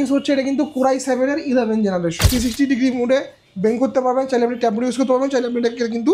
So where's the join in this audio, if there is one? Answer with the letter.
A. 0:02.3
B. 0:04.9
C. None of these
A